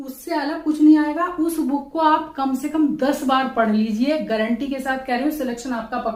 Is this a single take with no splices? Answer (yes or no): yes